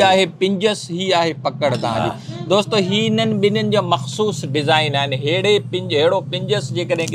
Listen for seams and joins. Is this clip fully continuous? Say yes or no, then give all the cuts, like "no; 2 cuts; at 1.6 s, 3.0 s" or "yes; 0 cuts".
yes; 0 cuts